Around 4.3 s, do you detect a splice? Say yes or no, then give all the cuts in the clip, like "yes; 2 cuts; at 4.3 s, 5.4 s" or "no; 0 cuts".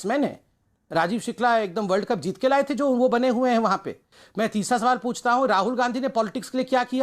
yes; 1 cut; at 4.3 s